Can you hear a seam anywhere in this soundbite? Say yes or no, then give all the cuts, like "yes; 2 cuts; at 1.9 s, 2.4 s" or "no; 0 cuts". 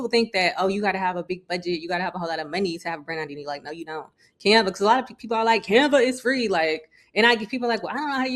no; 0 cuts